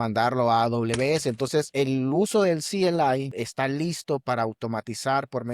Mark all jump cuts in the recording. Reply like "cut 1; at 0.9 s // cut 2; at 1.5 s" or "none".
cut 1; at 1.7 s // cut 2; at 3.3 s